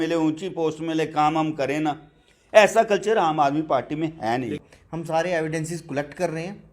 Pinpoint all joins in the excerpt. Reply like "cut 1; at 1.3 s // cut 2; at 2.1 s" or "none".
cut 1; at 4.6 s